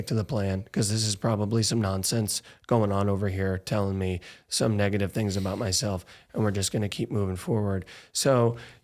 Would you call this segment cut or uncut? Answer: uncut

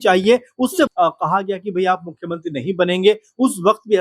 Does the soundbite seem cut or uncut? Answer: cut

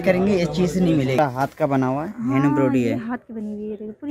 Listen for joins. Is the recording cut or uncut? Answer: cut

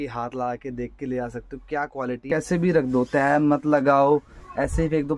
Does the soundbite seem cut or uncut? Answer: cut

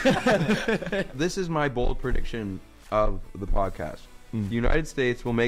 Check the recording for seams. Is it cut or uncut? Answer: cut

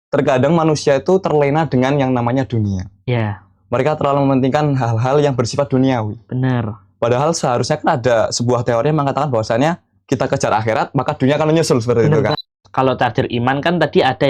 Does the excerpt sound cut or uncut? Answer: cut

